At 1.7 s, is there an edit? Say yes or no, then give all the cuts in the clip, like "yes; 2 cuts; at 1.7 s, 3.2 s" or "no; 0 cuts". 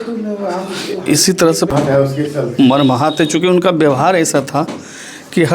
yes; 1 cut; at 1.7 s